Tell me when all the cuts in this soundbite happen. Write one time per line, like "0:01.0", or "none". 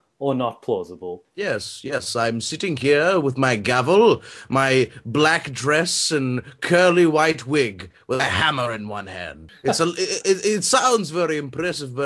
none